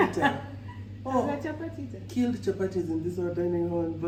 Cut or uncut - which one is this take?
uncut